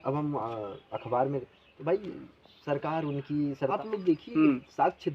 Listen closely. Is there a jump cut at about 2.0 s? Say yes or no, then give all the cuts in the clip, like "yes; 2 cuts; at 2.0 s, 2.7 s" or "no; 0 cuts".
no; 1 cut; at 3.8 s